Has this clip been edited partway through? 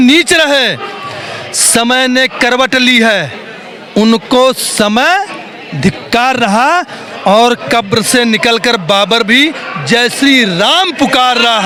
no; 0 cuts

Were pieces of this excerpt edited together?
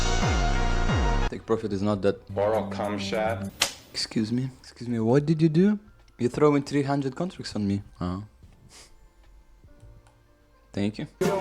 yes; 1 cut; at 1.3 s

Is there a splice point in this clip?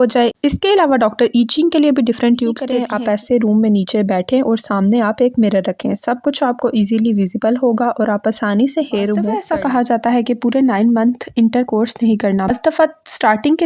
yes; 2 cuts; at 2.7 s, 9.4 s

